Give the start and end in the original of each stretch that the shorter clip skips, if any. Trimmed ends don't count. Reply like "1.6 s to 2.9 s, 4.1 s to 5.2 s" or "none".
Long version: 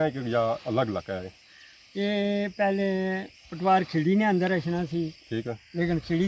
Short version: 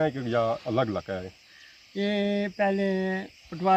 none